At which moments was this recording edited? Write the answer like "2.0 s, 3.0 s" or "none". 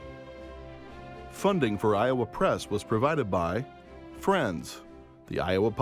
1.3 s